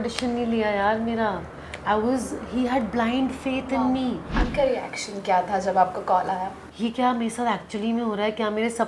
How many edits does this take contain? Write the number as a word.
two